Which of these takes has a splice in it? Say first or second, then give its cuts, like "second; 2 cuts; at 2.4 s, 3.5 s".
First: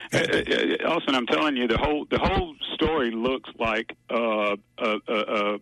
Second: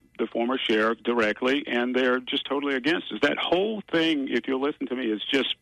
first; 1 cut; at 4.0 s